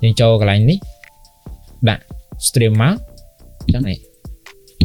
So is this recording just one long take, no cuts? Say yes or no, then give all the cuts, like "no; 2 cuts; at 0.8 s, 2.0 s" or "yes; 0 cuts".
yes; 0 cuts